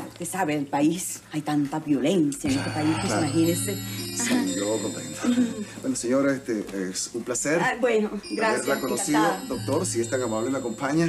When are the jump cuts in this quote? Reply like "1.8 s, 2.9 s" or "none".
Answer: 5.1 s